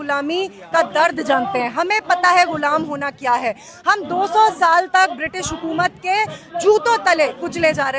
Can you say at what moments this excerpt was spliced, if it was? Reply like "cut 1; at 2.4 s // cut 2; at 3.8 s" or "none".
none